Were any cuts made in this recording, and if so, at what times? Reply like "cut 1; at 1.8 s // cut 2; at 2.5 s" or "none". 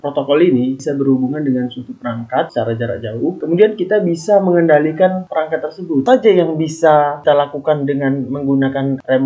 cut 1; at 0.8 s // cut 2; at 2.5 s // cut 3; at 6.0 s